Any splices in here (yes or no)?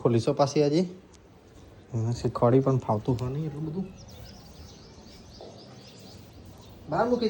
no